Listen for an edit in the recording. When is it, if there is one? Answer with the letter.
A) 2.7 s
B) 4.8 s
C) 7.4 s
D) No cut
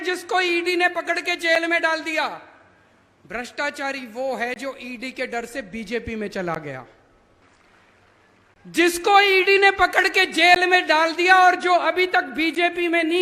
C